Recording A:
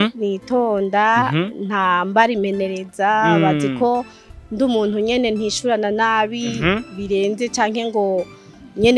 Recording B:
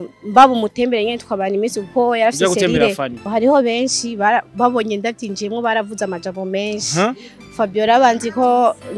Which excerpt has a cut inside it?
B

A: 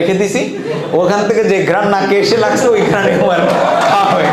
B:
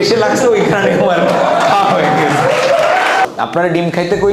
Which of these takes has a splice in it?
B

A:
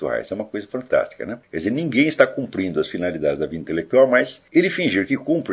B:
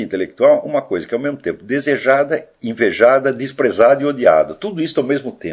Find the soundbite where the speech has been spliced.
A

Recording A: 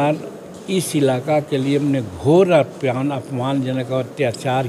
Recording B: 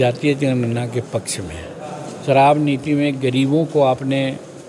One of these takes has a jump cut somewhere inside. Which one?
B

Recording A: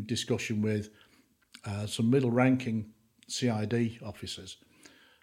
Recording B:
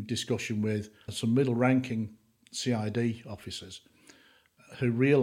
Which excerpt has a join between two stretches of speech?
B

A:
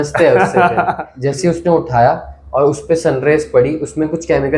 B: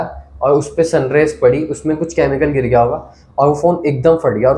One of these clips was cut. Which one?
A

